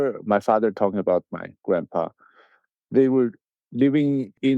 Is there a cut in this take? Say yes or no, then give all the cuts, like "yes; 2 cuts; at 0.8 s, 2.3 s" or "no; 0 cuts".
no; 0 cuts